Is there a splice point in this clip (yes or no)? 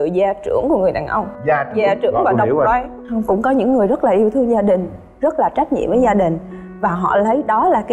no